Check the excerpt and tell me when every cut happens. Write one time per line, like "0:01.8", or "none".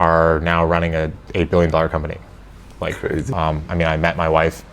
0:03.3

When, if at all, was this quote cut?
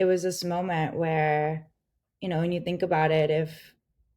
none

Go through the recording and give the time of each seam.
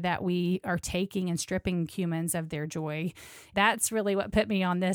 0:03.5

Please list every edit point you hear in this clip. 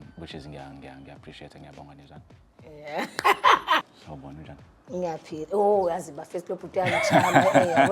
0:03.8

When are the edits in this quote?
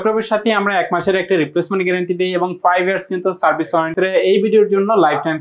0:03.9

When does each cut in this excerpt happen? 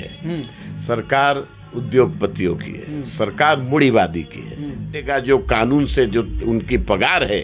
0:05.1

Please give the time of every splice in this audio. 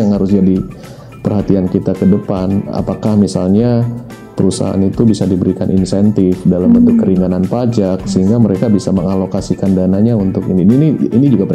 none

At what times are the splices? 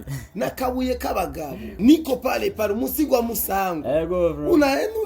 0:01.8

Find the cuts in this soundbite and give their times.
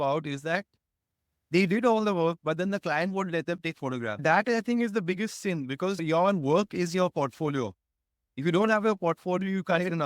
0:04.1

